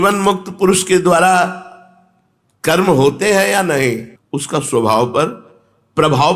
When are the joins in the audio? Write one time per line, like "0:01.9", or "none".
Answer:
0:04.1